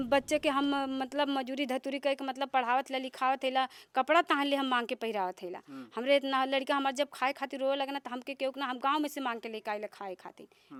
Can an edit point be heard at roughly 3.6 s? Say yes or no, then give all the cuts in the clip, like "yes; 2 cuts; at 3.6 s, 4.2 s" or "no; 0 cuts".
no; 0 cuts